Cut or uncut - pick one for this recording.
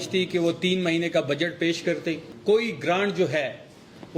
cut